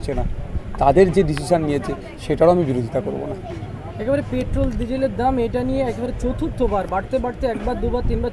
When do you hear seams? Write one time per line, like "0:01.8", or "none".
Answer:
none